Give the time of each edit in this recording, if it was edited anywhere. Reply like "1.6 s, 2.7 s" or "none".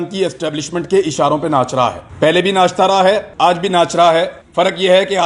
2.0 s, 3.3 s, 4.4 s